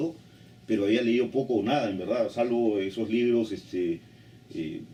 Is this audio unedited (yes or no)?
yes